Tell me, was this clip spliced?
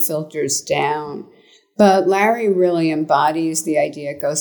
no; 0 cuts

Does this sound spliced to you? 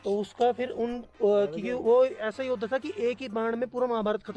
no; 0 cuts

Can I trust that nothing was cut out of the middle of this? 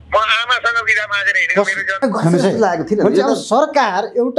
no; 1 cut; at 2.0 s

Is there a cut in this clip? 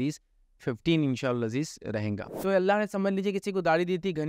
yes; 1 cut; at 2.2 s

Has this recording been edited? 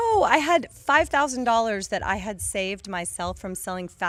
no; 0 cuts

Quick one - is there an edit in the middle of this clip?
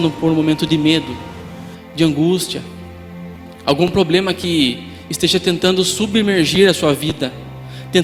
no; 0 cuts

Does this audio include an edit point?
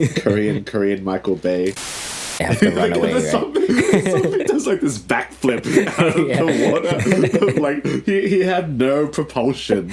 yes; 1 cut; at 2.1 s

